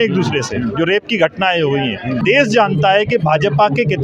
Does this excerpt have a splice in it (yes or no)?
yes